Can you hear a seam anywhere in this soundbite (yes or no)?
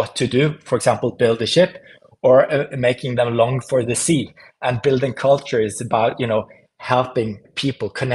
no